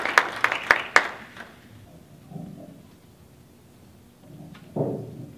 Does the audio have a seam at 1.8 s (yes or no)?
yes